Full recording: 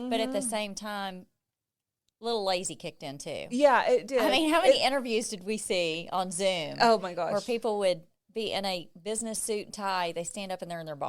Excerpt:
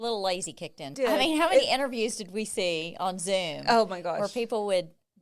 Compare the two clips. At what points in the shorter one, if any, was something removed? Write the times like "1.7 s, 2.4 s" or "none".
0.9 s